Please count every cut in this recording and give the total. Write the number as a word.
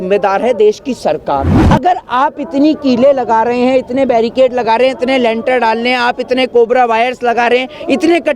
one